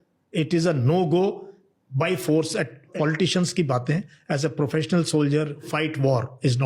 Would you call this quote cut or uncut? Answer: cut